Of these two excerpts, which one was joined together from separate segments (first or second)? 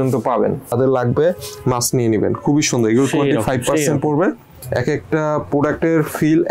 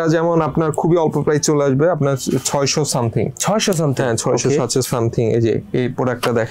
first